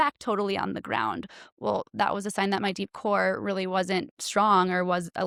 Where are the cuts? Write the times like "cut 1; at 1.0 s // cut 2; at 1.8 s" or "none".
none